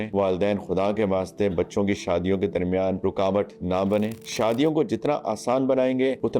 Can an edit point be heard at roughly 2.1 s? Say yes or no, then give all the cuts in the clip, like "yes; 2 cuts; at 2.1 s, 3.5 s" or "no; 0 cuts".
no; 1 cut; at 4.2 s